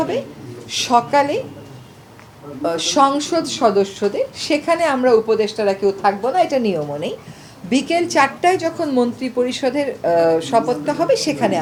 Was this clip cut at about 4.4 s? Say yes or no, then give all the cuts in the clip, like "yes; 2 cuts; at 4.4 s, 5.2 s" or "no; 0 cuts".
no; 0 cuts